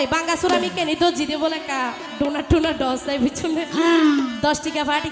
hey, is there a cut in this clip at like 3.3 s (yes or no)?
no